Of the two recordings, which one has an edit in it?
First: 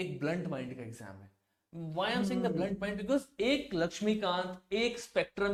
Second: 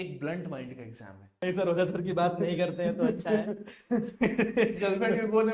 second; 1 cut; at 1.3 s

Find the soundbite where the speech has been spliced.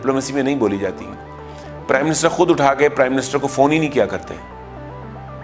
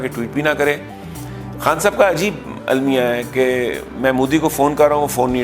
first; 1 cut; at 4.3 s

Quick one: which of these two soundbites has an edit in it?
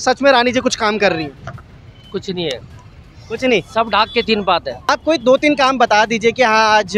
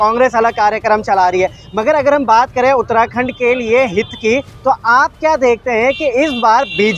first; 1 cut; at 4.9 s

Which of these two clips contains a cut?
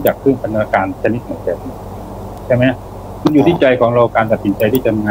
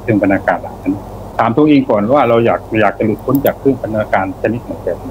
second; 1 cut; at 1.1 s

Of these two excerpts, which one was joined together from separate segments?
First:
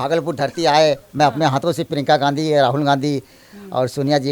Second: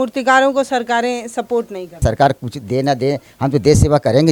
second; 1 cut; at 2.0 s

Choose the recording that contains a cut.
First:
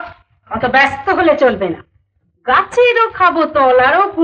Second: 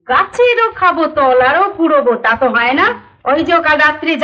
second; 1 cut; at 3.1 s

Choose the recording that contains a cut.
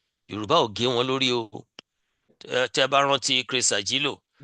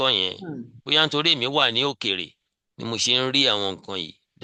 first; 1 cut; at 2.4 s

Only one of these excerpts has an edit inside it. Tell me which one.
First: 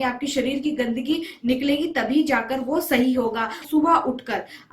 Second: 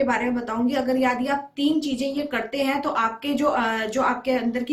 first; 1 cut; at 3.6 s

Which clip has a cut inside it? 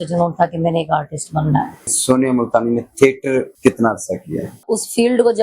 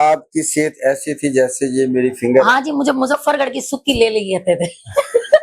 first; 3 cuts; at 1.9 s, 3.5 s, 4.6 s

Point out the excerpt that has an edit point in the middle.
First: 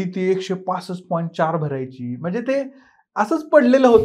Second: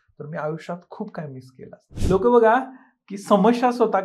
second; 1 cut; at 1.9 s

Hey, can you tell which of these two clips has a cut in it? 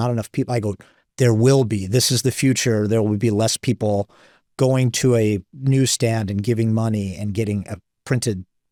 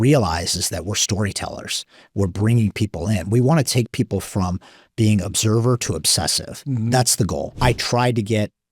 second; 1 cut; at 7.5 s

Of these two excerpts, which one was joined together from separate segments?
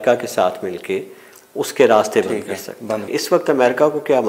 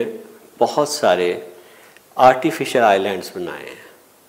first; 1 cut; at 3.1 s

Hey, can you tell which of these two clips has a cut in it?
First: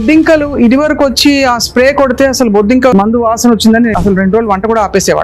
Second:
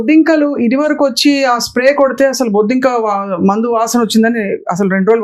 first; 2 cuts; at 2.9 s, 3.9 s

